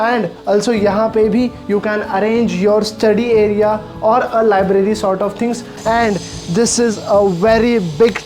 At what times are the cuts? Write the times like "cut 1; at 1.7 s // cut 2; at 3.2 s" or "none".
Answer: cut 1; at 5.7 s